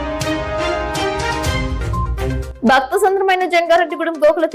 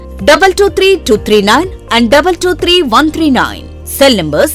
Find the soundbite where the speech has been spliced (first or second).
first